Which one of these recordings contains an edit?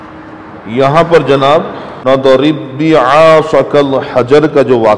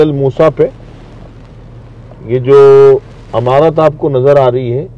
first; 1 cut; at 1.8 s

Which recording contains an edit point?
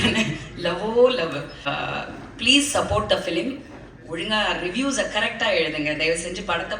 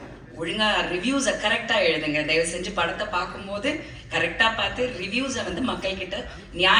first; 1 cut; at 1.7 s

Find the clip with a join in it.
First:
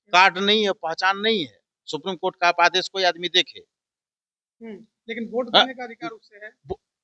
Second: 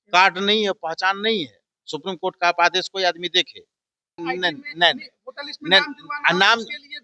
second; 1 cut; at 4.2 s

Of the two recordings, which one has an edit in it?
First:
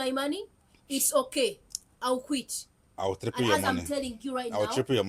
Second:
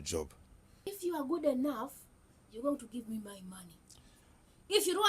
second; 1 cut; at 0.9 s

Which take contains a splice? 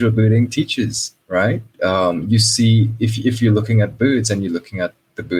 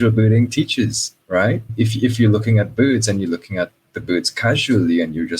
second; 1 cut; at 1.7 s

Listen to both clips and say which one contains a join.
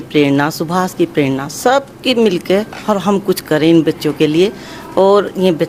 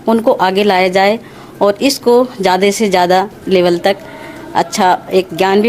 second; 1 cut; at 3.4 s

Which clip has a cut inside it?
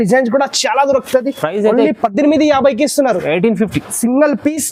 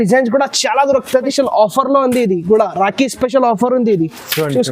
second; 1 cut; at 1.3 s

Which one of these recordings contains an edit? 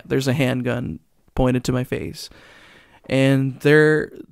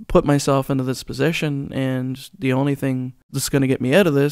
second; 1 cut; at 3.3 s

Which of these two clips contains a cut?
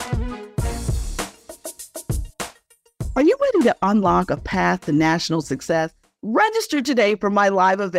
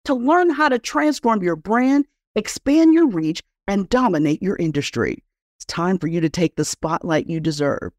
first; 2 cuts; at 1.3 s, 3.1 s

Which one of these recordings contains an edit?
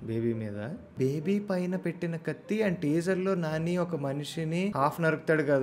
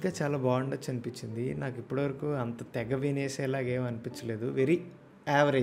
first; 2 cuts; at 0.9 s, 4.7 s

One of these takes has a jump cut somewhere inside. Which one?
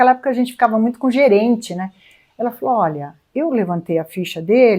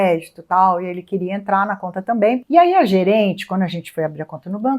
second; 1 cut; at 2.4 s

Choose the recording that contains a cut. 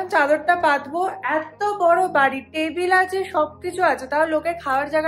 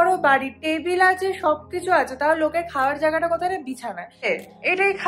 second; 1 cut; at 4.1 s

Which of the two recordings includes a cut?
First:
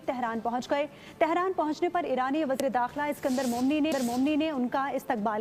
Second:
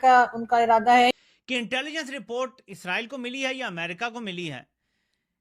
second; 1 cut; at 1.1 s

